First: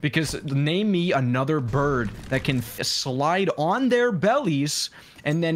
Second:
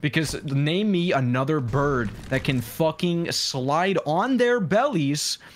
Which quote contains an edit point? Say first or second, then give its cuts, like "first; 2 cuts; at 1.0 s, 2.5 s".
first; 1 cut; at 2.8 s